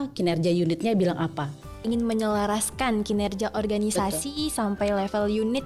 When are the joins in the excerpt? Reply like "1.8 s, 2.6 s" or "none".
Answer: 1.8 s